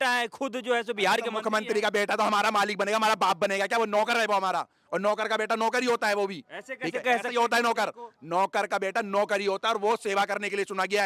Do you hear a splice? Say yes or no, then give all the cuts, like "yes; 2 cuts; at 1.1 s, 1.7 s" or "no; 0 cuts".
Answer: no; 0 cuts